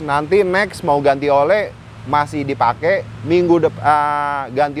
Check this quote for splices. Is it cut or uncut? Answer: uncut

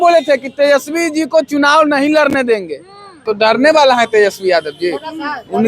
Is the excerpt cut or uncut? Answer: cut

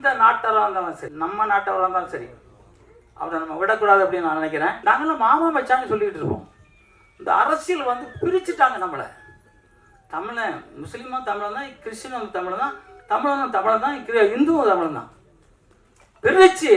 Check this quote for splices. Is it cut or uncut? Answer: cut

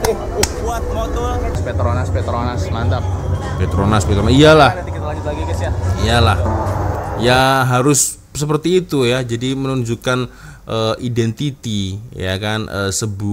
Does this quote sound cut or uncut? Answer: cut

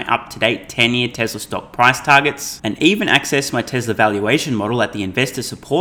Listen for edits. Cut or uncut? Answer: uncut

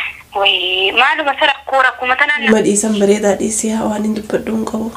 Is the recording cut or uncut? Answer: cut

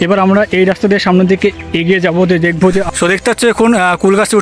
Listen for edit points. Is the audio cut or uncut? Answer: cut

